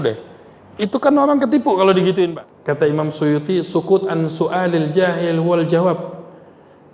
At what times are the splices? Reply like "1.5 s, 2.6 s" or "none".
2.3 s